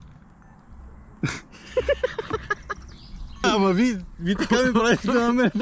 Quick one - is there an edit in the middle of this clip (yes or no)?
yes